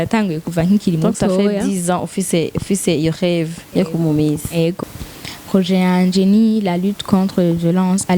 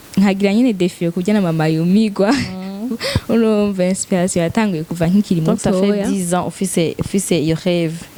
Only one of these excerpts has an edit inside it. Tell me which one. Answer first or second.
first